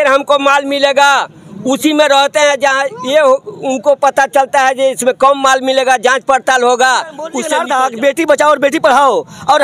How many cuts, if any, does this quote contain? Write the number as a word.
one